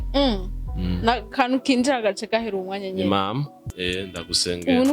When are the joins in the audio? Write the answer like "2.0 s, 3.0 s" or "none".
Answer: 3.6 s